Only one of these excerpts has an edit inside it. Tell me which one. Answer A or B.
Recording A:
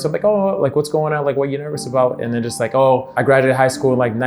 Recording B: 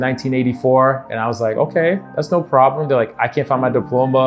A